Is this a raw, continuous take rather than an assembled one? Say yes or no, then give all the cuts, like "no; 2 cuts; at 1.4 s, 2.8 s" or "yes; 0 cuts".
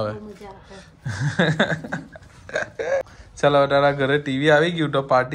no; 1 cut; at 3.0 s